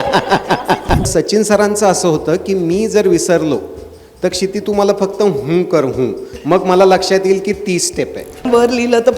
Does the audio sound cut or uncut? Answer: cut